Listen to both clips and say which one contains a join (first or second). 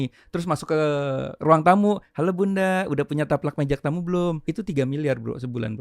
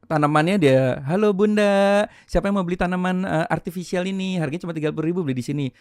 first